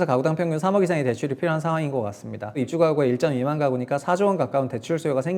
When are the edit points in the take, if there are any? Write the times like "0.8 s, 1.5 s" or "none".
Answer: 2.7 s